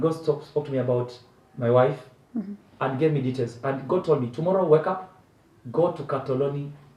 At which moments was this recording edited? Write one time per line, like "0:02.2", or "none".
none